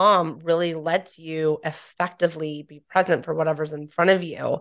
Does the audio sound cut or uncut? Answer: uncut